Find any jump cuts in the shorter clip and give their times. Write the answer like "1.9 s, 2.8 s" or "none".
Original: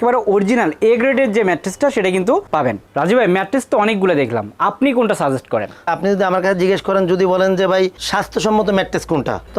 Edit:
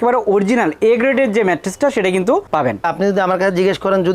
2.8 s